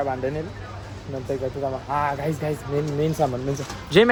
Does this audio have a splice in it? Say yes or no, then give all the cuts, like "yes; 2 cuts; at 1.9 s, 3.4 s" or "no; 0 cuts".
no; 0 cuts